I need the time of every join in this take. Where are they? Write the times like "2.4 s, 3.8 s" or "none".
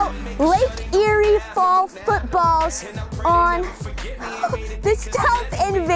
none